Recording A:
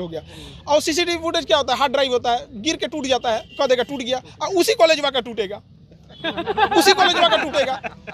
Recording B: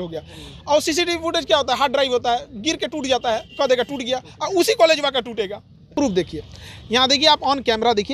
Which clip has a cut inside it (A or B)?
B